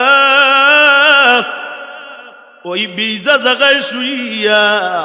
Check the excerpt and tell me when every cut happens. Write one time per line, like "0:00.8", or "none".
none